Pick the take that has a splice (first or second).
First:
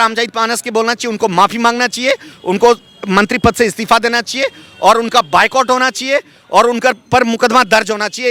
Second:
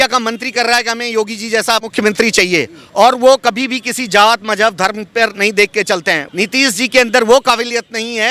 second